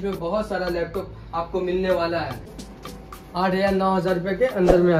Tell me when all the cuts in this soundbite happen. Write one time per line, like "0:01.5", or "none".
0:02.5